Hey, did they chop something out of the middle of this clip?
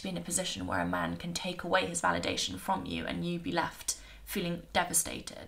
no; 0 cuts

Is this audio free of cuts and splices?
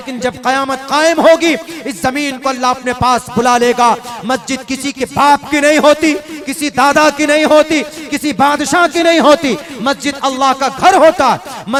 yes; 0 cuts

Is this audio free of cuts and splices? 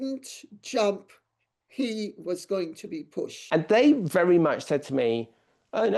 no; 1 cut; at 3.4 s

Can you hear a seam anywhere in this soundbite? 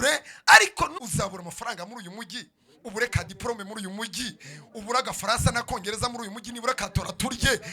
yes; 1 cut; at 0.9 s

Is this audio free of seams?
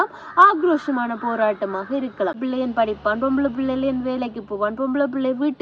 no; 1 cut; at 2.4 s

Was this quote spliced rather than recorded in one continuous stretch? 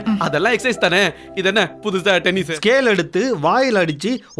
yes; 1 cut; at 2.5 s

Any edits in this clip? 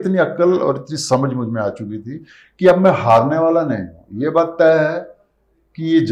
no; 0 cuts

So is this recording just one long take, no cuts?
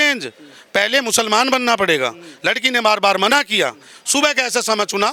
yes; 0 cuts

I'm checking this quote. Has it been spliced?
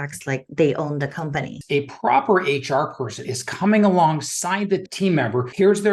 yes; 1 cut; at 1.5 s

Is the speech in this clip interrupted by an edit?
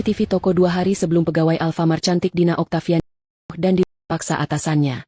no; 0 cuts

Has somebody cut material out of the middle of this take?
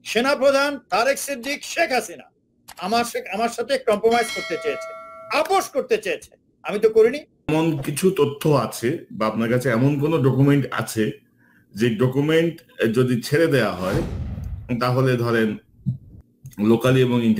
yes; 1 cut; at 7.5 s

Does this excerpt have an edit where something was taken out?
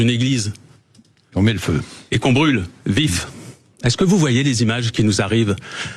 no; 0 cuts

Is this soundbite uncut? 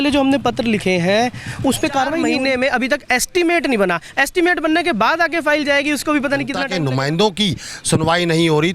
no; 2 cuts; at 2.3 s, 6.7 s

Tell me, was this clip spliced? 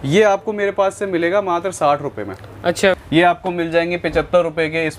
yes; 1 cut; at 3.0 s

